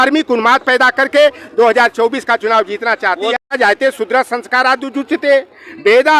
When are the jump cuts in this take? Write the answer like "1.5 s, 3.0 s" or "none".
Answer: 3.4 s